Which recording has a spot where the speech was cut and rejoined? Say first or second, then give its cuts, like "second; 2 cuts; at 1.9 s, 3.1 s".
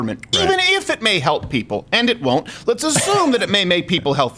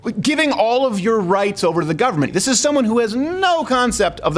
second; 1 cut; at 2.3 s